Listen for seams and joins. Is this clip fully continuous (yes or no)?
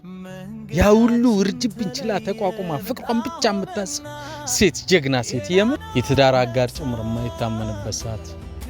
no